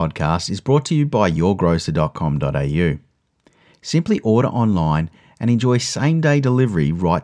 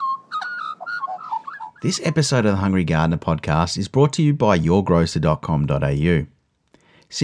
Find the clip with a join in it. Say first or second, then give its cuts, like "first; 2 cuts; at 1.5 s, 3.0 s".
second; 1 cut; at 1.6 s